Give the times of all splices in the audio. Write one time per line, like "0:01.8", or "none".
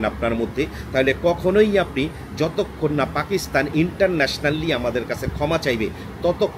none